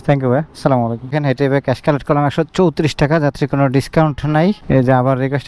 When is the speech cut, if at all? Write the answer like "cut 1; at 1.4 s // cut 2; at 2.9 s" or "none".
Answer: none